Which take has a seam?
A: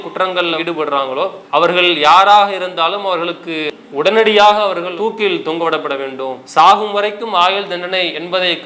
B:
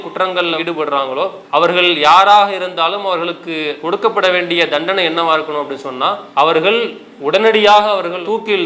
A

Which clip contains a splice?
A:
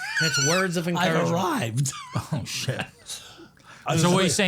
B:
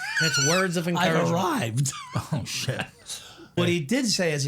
B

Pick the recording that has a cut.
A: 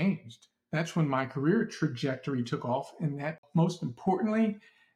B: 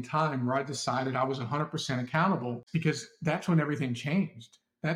A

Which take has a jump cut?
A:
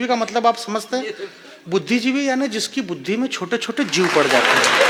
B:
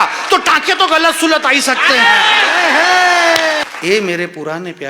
B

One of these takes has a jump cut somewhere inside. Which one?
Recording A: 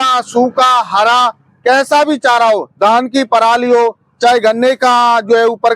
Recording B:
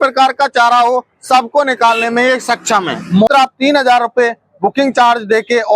B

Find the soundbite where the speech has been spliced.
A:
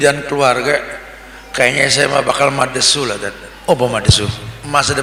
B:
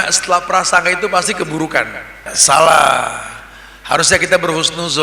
B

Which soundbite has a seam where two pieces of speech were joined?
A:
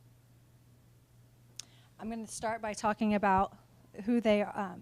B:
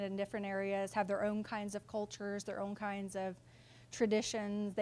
A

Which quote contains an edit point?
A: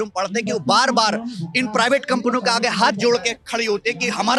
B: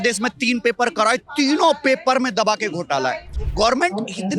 B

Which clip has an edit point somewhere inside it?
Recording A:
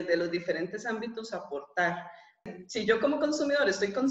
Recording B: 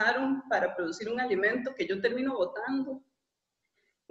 A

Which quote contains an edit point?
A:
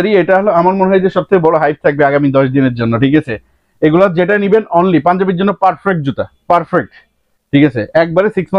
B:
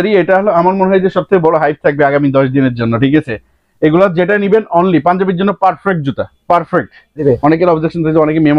B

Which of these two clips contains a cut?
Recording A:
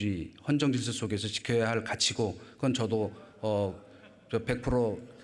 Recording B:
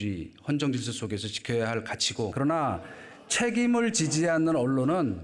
B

